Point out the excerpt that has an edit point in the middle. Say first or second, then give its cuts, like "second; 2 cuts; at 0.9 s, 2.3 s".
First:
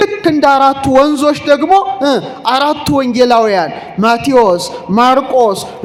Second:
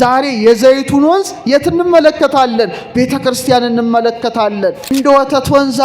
second; 1 cut; at 4.9 s